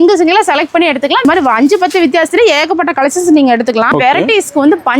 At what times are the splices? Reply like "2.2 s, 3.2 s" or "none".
1.2 s, 3.9 s